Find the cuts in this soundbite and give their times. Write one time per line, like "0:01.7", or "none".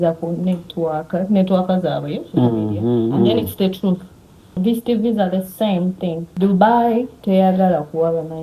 0:04.6
0:06.2
0:07.1